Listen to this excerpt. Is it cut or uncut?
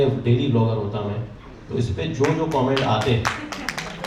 uncut